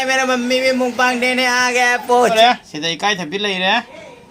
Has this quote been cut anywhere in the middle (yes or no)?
yes